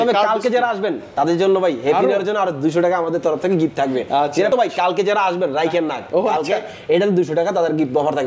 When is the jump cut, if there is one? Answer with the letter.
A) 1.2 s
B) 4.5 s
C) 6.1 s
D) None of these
B